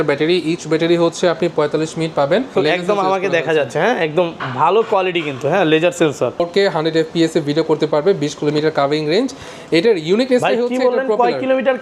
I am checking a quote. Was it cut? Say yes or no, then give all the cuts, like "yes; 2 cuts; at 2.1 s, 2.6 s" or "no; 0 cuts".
yes; 2 cuts; at 2.5 s, 6.5 s